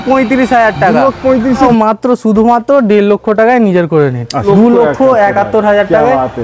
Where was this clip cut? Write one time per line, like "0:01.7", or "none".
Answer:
0:01.7
0:04.5